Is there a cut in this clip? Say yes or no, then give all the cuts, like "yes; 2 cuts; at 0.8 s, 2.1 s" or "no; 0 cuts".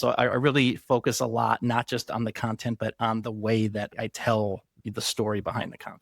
yes; 2 cuts; at 3.9 s, 4.7 s